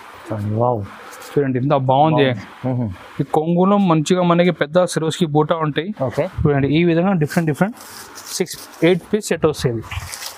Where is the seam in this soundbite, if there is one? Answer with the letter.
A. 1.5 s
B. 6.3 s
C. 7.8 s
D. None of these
B